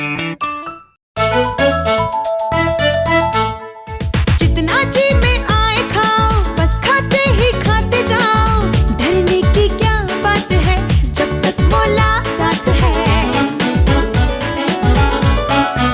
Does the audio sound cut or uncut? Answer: cut